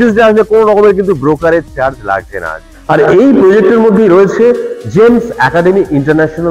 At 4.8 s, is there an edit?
no; 1 cut; at 2.6 s

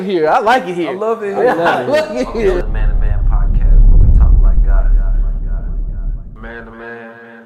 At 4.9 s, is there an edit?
no; 1 cut; at 2.6 s

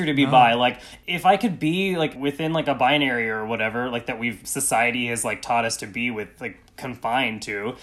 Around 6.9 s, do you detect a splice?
no; 3 cuts; at 0.9 s, 2.1 s, 4.4 s

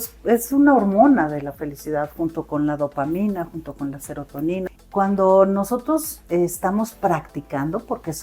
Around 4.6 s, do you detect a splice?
yes; 1 cut; at 4.6 s

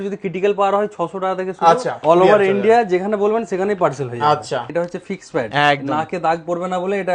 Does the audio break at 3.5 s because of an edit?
no; 2 cuts; at 1.9 s, 4.7 s

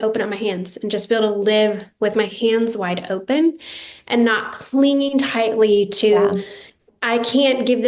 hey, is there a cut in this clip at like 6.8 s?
yes; 1 cut; at 6.8 s

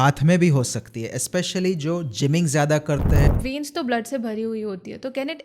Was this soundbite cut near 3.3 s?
yes; 1 cut; at 3.3 s

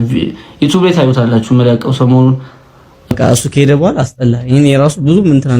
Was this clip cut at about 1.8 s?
no; 1 cut; at 3.1 s

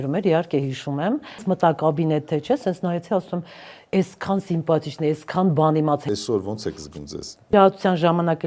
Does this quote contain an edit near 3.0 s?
no; 3 cuts; at 1.5 s, 6.0 s, 7.5 s

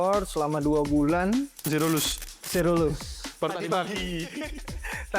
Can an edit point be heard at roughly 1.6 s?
yes; 1 cut; at 1.6 s

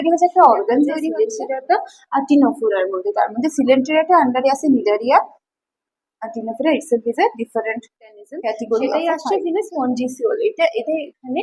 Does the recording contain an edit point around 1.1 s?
yes; 2 cuts; at 1.1 s, 8.9 s

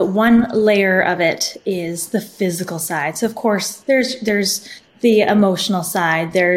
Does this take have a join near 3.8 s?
no; 0 cuts

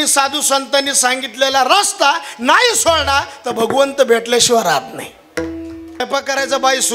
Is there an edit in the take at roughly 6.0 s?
yes; 1 cut; at 6.0 s

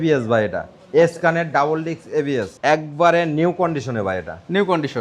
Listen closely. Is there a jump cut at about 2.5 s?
yes; 1 cut; at 2.5 s

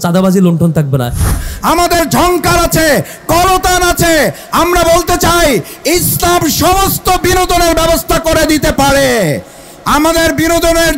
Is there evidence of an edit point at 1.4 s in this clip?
yes; 1 cut; at 1.4 s

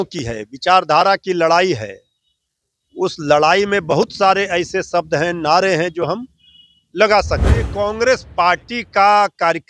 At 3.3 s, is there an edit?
no; 1 cut; at 7.7 s

